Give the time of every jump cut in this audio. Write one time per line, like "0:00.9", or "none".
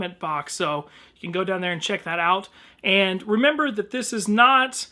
0:03.8